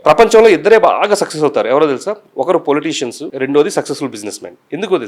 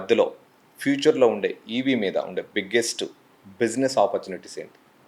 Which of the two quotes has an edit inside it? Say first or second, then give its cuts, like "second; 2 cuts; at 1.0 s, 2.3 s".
first; 1 cut; at 3.2 s